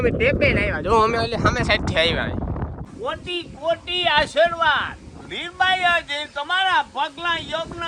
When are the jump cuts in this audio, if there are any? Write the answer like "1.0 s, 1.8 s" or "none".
2.9 s